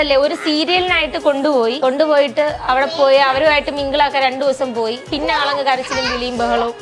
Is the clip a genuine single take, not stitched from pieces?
no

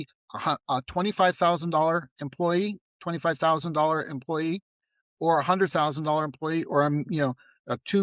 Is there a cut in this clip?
no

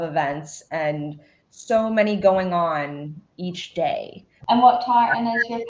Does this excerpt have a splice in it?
yes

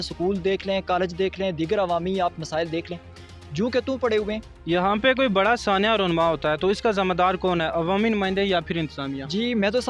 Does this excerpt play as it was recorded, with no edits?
no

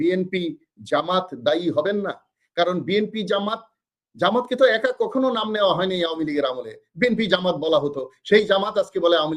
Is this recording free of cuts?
yes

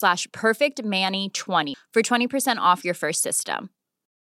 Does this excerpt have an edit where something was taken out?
yes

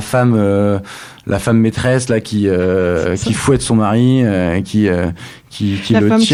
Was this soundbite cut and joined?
no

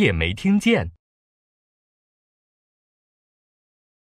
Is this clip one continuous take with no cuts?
yes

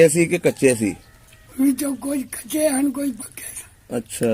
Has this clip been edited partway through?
no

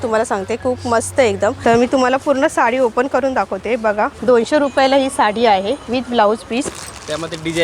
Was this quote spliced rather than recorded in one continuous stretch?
yes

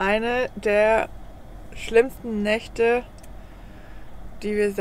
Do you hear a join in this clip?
no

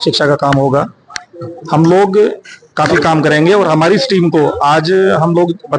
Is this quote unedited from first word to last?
yes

